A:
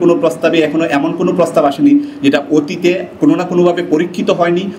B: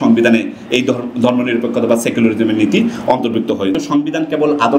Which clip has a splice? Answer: B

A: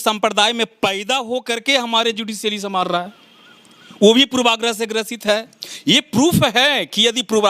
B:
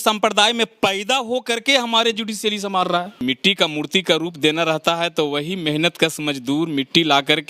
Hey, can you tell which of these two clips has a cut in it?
B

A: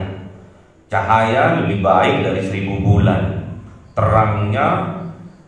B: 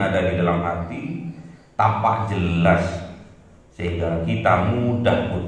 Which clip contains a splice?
A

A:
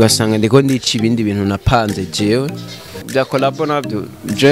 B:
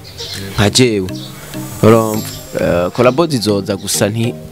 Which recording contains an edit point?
A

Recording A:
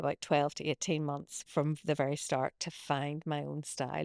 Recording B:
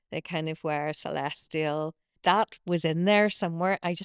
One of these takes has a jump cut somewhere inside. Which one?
B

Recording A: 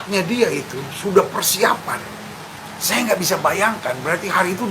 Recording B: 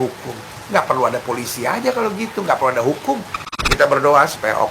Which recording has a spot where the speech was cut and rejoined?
B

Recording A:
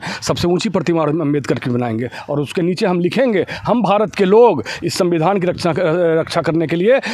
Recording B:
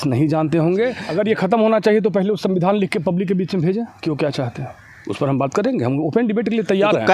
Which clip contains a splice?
B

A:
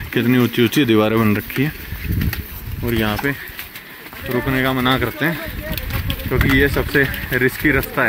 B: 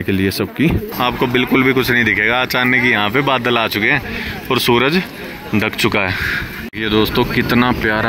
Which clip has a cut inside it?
B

